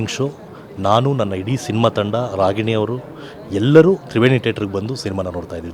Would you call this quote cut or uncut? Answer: uncut